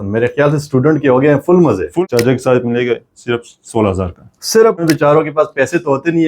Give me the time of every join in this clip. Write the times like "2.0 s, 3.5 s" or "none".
1.9 s, 4.8 s